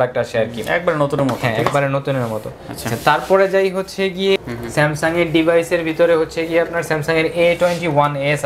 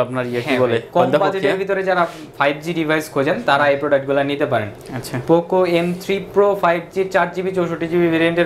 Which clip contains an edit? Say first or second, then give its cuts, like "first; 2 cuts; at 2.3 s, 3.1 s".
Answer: first; 1 cut; at 4.4 s